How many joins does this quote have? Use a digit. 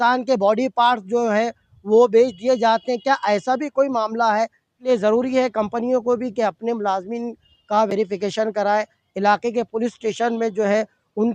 1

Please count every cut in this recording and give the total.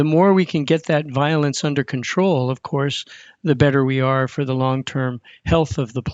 0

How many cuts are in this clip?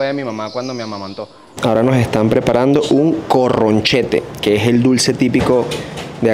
1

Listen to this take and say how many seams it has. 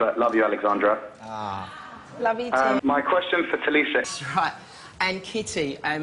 1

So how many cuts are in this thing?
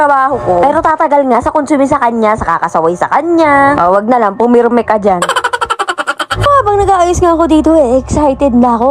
1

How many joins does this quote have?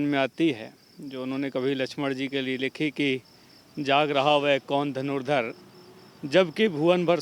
0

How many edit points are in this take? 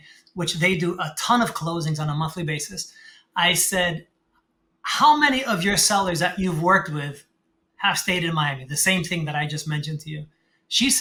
0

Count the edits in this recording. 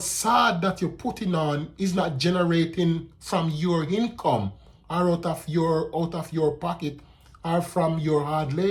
0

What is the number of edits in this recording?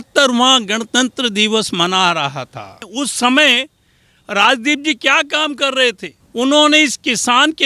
2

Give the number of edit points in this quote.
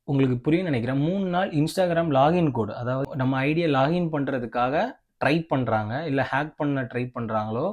1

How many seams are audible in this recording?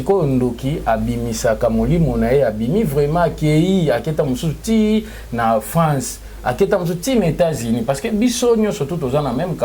0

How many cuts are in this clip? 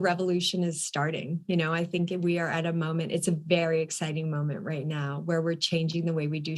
0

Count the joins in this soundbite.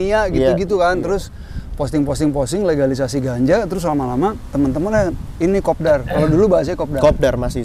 0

